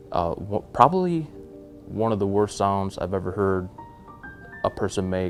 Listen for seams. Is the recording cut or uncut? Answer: uncut